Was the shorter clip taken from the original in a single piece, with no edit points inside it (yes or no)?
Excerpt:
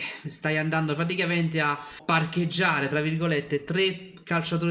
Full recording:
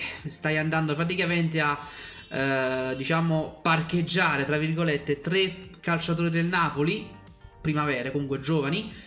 no